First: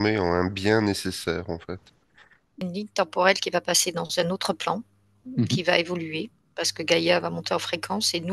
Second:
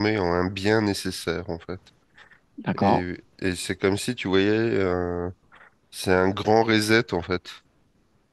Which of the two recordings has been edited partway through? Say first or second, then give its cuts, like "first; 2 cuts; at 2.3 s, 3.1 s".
first; 1 cut; at 2.6 s